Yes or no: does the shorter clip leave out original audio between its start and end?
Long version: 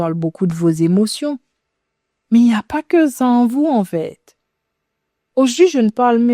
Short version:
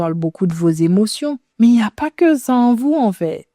yes